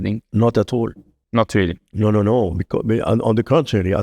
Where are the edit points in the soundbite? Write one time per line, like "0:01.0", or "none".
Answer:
none